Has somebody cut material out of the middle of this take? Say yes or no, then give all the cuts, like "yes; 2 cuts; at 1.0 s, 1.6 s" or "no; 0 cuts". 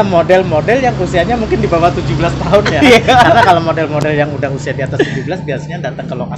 no; 0 cuts